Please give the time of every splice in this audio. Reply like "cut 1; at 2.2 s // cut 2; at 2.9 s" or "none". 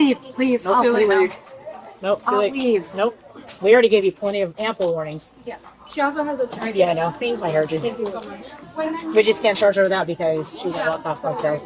none

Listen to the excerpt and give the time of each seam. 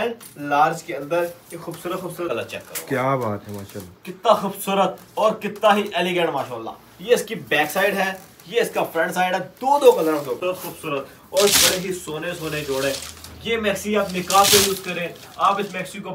cut 1; at 2.3 s // cut 2; at 10.4 s

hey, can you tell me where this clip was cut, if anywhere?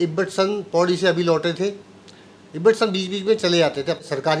none

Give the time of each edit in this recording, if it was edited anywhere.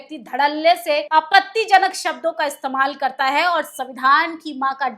cut 1; at 1.1 s

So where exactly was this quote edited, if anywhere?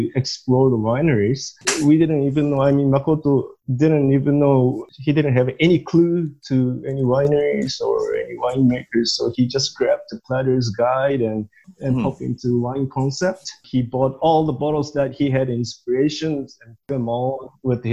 cut 1; at 4.8 s

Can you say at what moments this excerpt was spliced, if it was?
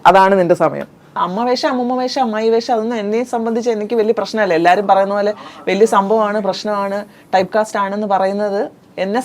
cut 1; at 1.1 s

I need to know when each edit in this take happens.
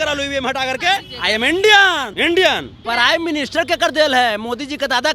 cut 1; at 1.1 s // cut 2; at 2.1 s // cut 3; at 2.7 s

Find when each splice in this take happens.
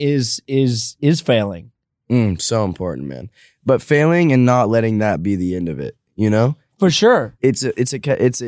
cut 1; at 7.3 s

